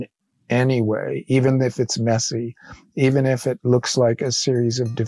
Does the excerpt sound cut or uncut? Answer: uncut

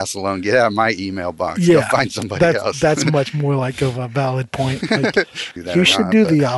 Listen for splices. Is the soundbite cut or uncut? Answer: cut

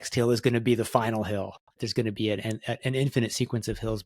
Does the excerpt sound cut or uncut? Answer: cut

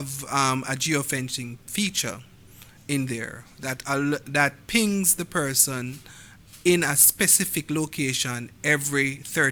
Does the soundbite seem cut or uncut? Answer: uncut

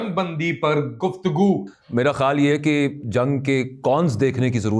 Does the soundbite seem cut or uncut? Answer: cut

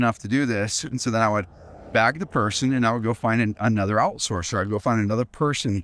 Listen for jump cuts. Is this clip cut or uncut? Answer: uncut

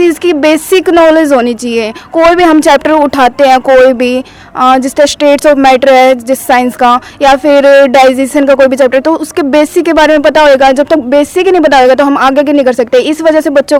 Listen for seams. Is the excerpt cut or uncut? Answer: uncut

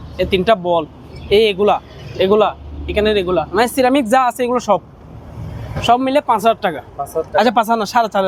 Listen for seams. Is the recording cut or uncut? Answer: uncut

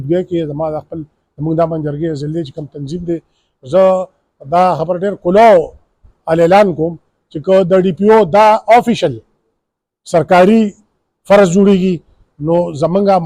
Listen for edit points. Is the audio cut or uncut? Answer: uncut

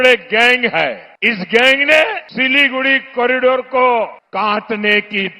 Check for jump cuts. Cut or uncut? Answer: cut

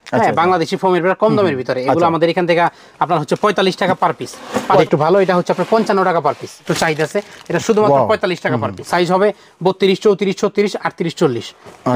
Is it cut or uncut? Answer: cut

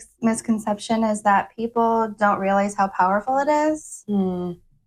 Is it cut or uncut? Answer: uncut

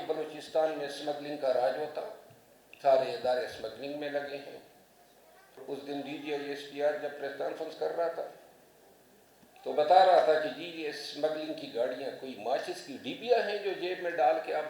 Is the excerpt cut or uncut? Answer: cut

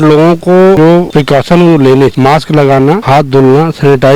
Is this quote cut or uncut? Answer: cut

